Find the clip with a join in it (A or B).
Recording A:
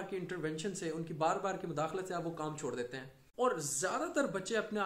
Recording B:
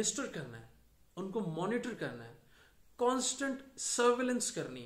A